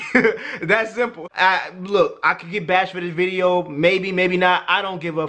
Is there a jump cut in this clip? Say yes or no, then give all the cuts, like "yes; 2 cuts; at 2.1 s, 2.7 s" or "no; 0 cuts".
yes; 1 cut; at 1.2 s